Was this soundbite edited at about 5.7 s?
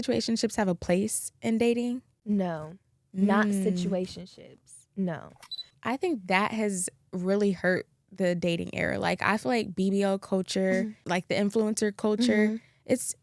yes; 3 cuts; at 2.1 s, 5.7 s, 11.1 s

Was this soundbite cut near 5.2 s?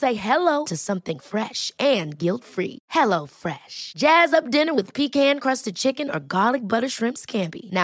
no; 0 cuts

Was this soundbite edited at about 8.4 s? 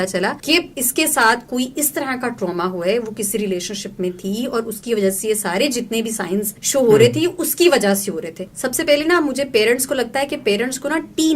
yes; 1 cut; at 8.4 s

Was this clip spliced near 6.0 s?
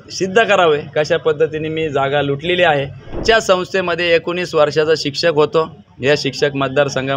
no; 1 cut; at 3.2 s

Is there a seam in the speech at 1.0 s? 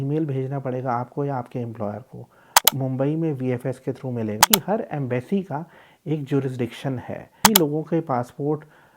no; 3 cuts; at 2.7 s, 4.4 s, 7.4 s

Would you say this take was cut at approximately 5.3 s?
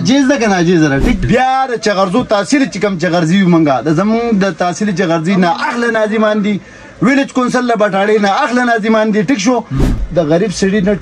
no; 2 cuts; at 1.2 s, 9.8 s

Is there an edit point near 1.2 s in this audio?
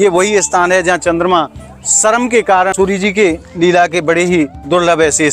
no; 1 cut; at 2.7 s

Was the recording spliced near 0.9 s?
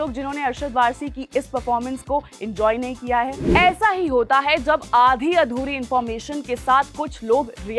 no; 1 cut; at 3.4 s

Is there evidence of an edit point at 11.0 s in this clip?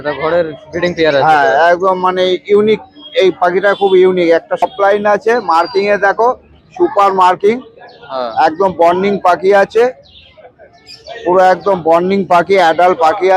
no; 1 cut; at 4.6 s

